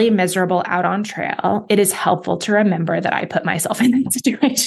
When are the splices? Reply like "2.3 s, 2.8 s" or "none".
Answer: none